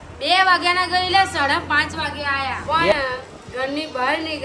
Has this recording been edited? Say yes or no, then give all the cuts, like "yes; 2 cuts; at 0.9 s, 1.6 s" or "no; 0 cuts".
yes; 1 cut; at 2.9 s